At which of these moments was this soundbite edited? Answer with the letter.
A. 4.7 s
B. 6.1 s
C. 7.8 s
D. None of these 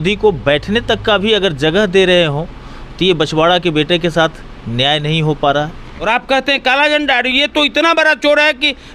B